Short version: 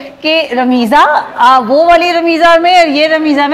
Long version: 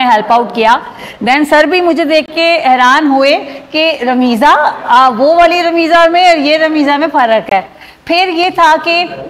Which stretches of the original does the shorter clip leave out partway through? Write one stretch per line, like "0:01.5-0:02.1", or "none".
none